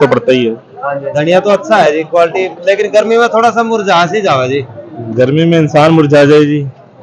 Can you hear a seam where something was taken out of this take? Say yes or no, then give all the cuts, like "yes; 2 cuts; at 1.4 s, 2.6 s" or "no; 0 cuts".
yes; 1 cut; at 1.0 s